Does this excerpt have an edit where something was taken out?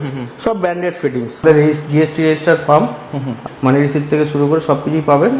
yes; 2 cuts; at 1.4 s, 3.4 s

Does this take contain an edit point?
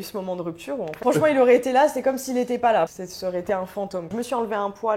yes; 3 cuts; at 0.9 s, 3.0 s, 4.1 s

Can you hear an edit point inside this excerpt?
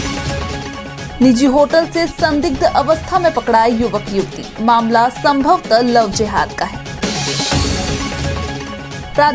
yes; 1 cut; at 1.0 s

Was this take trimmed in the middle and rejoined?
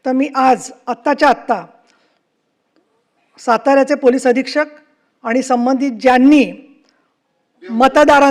no; 0 cuts

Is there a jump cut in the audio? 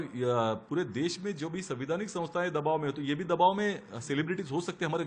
no; 0 cuts

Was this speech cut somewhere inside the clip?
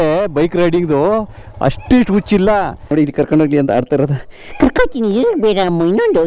yes; 1 cut; at 2.8 s

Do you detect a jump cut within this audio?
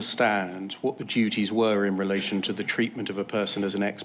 no; 0 cuts

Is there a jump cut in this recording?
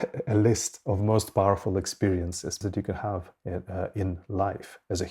yes; 1 cut; at 2.5 s

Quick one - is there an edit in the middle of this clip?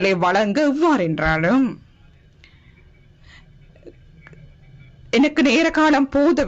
no; 0 cuts

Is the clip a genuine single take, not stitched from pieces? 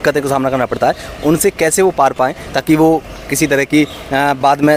yes; 0 cuts

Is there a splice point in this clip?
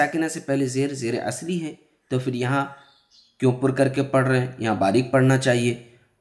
no; 0 cuts

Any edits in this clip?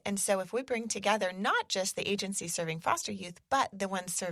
no; 0 cuts

